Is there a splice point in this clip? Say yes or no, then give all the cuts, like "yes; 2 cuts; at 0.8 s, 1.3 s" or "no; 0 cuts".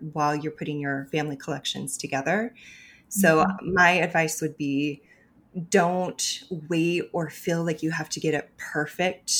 no; 0 cuts